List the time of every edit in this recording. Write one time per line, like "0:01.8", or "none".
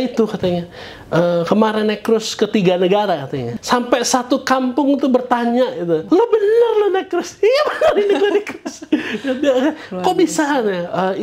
0:03.5
0:06.0